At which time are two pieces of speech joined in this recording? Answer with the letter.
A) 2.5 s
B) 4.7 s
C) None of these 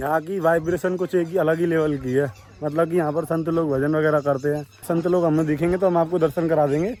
C